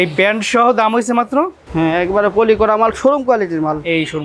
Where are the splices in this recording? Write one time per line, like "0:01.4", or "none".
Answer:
0:01.6